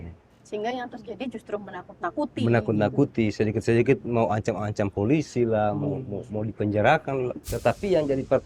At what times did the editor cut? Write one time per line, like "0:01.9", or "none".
0:07.5